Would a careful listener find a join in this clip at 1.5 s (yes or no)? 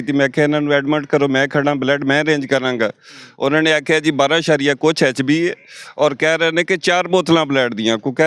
no